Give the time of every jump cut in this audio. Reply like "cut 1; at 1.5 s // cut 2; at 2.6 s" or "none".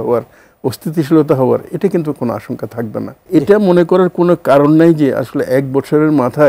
cut 1; at 3.2 s